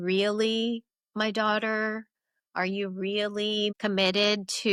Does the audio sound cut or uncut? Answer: uncut